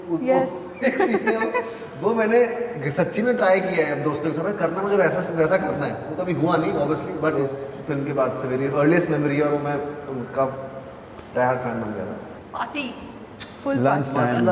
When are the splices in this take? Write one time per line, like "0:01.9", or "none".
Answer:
0:12.2